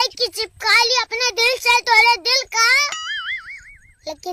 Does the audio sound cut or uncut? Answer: uncut